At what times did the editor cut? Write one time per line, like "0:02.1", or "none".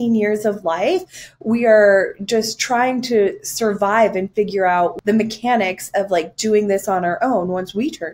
0:05.0